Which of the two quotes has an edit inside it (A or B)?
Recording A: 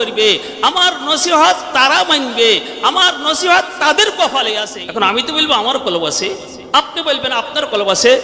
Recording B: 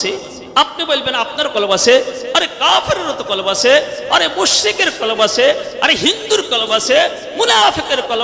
A